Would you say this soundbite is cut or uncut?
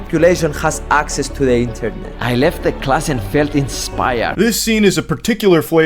cut